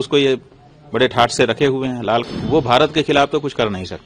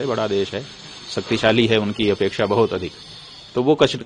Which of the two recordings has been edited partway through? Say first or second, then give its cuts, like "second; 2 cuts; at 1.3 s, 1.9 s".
first; 1 cut; at 2.2 s